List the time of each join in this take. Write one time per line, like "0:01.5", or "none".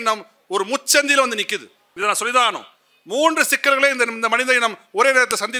0:01.8